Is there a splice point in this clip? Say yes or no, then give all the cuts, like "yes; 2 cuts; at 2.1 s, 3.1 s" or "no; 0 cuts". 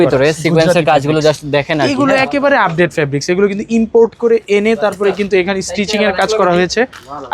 no; 0 cuts